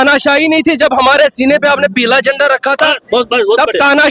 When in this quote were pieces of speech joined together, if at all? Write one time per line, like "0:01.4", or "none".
none